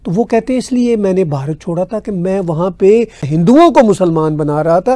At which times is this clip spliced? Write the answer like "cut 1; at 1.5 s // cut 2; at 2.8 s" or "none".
cut 1; at 3.2 s